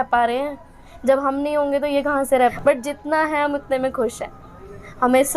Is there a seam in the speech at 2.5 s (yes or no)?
yes